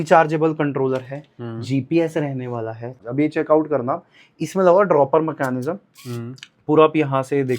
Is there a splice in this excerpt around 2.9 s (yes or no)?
yes